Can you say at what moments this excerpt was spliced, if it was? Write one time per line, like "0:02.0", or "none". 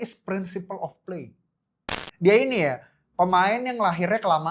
0:02.0